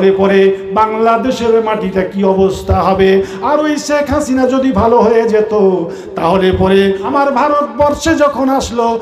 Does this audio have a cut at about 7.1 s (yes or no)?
yes